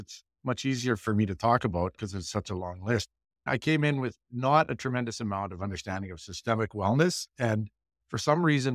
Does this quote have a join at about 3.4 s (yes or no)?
yes